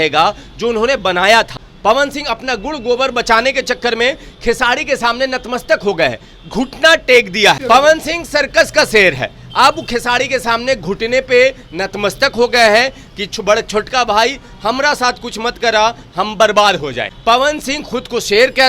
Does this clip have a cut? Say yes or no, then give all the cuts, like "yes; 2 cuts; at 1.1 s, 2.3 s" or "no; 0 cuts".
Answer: yes; 3 cuts; at 1.6 s, 7.6 s, 17.1 s